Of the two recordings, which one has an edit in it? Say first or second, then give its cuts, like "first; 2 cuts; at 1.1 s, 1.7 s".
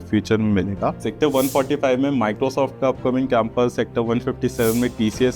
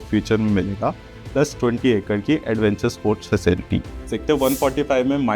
first; 1 cut; at 1.0 s